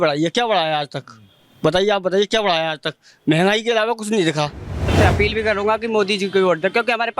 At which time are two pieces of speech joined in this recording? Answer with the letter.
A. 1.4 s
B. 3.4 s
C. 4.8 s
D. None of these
C